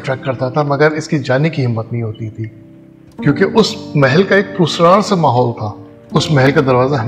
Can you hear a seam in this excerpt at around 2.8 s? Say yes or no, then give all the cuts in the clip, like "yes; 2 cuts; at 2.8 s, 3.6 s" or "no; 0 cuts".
no; 0 cuts